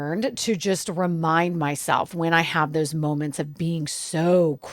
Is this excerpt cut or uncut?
uncut